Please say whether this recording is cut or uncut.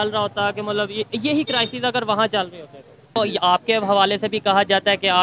cut